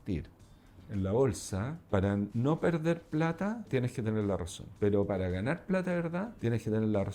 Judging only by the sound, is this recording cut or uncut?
cut